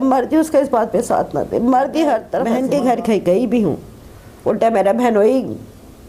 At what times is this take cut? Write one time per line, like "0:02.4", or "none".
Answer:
0:02.5